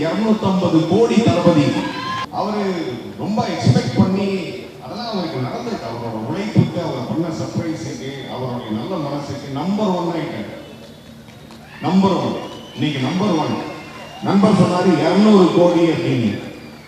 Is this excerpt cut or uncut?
cut